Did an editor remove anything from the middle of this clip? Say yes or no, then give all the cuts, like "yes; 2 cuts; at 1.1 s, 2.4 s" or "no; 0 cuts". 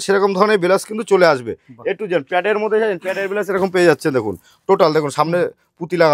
no; 0 cuts